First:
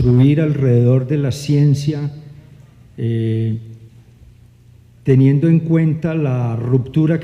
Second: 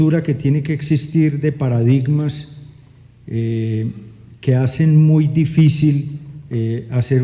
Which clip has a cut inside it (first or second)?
second